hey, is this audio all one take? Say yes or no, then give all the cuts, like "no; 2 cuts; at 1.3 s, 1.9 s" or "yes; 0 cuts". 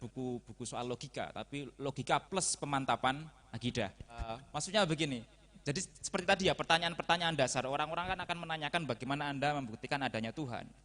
no; 1 cut; at 4.4 s